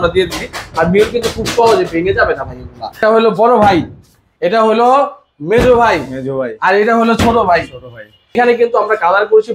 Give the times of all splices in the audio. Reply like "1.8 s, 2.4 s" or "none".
3.0 s, 8.3 s